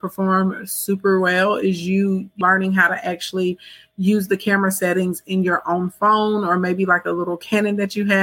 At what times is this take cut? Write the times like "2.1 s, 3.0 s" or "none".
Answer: 2.4 s